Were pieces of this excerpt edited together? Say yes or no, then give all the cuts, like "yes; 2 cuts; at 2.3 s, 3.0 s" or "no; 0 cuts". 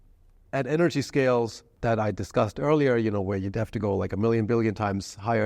yes; 1 cut; at 1.7 s